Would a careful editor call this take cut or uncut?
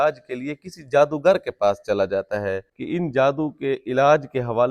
cut